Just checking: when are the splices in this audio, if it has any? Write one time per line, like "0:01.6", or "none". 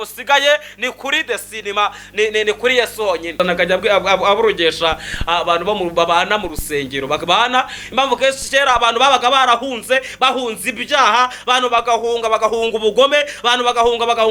0:03.3